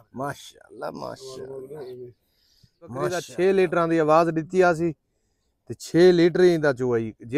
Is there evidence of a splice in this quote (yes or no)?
yes